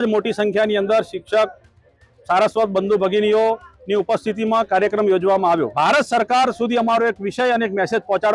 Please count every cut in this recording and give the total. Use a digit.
1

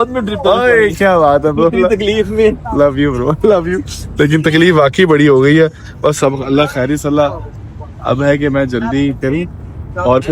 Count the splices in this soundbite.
0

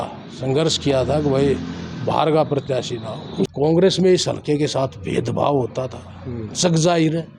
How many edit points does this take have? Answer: 1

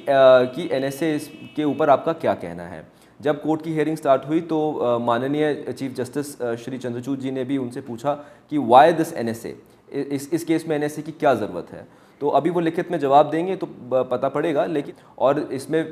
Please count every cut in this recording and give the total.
1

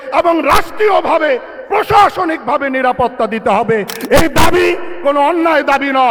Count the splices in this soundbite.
0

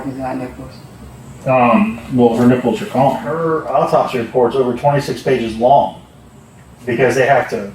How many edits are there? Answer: 1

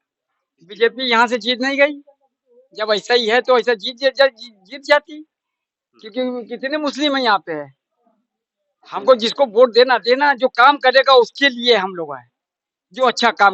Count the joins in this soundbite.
0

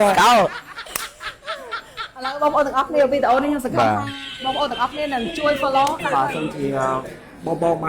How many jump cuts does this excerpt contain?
1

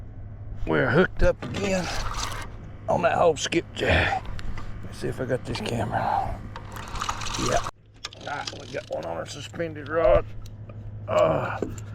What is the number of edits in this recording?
1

